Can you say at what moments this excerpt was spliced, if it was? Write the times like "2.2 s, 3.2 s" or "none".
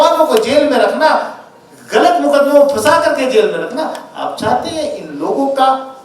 none